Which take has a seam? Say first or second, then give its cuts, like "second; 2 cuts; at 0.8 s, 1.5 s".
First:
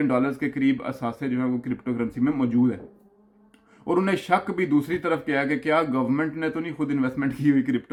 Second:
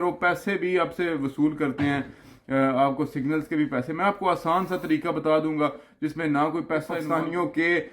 second; 1 cut; at 7.0 s